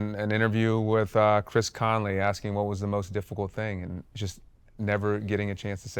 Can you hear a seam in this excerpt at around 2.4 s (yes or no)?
no